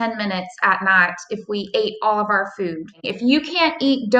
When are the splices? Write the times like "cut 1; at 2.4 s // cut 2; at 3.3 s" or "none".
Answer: cut 1; at 3.0 s